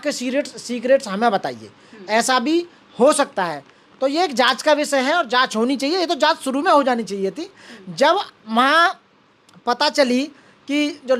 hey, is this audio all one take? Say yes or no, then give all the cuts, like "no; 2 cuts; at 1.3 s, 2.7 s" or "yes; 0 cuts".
yes; 0 cuts